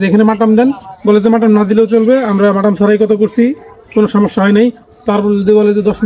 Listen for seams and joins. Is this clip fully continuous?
yes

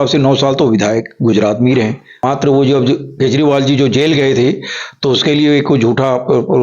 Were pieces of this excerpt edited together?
yes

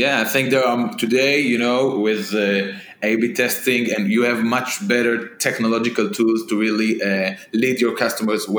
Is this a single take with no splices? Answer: yes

